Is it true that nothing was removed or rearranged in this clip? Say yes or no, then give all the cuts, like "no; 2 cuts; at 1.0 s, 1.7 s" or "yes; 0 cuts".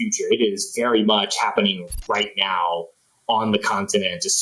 yes; 0 cuts